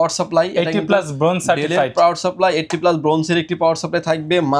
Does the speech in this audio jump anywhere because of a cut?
no; 0 cuts

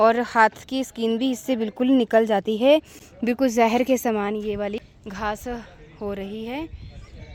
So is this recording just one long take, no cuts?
yes; 0 cuts

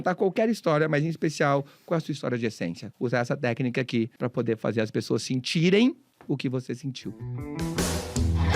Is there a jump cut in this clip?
yes; 4 cuts; at 2.8 s, 4.1 s, 6.1 s, 7.3 s

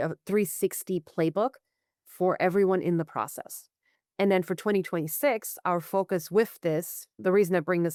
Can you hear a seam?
no; 0 cuts

